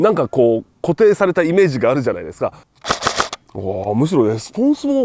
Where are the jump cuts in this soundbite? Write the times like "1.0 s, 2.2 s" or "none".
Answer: 2.6 s